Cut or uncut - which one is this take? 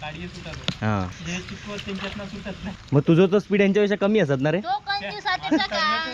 cut